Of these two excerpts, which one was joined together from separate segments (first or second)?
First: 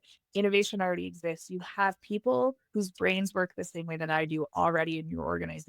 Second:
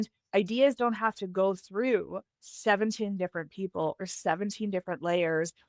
first